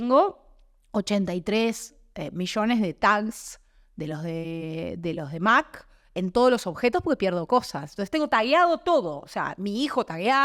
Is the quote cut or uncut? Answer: uncut